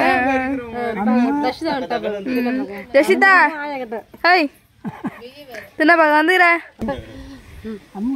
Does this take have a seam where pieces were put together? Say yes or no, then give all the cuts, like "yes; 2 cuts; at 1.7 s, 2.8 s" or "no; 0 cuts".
yes; 1 cut; at 6.8 s